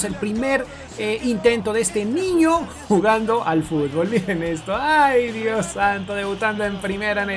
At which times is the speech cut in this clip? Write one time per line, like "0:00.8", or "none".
none